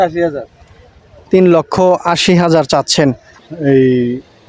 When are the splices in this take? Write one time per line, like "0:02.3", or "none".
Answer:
0:03.3